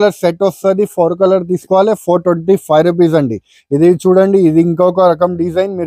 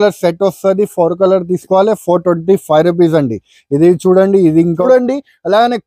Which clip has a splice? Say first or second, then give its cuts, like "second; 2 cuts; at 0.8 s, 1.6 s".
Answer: second; 1 cut; at 4.8 s